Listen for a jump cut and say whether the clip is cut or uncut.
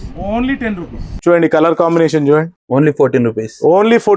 cut